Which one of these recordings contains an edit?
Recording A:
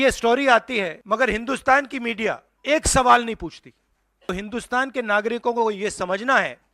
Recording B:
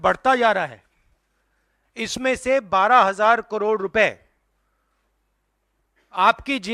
A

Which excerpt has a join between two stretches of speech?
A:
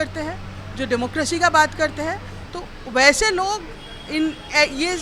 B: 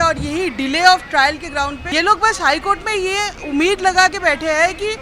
B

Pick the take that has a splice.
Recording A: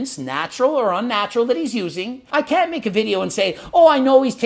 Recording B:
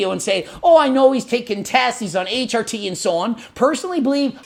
A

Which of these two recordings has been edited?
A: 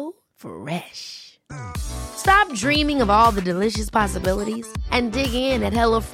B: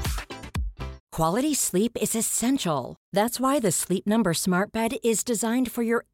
B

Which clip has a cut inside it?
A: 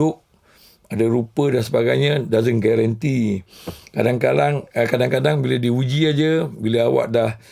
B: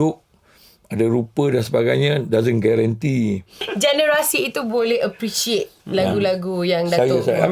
B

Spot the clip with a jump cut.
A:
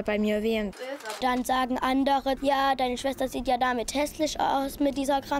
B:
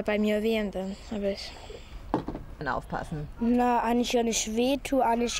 A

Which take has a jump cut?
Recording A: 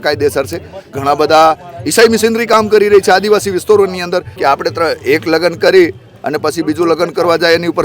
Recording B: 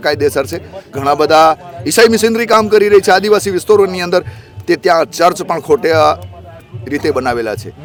A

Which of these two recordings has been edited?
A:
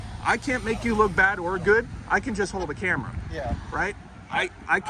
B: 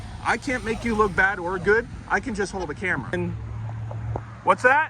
B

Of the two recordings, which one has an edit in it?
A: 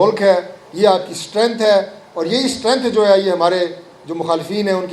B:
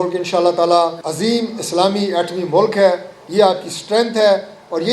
B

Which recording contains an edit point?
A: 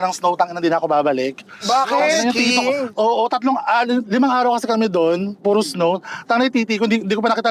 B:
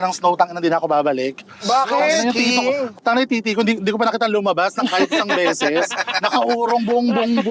B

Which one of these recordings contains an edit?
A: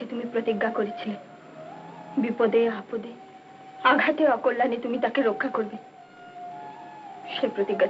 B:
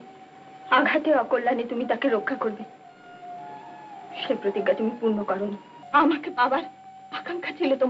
B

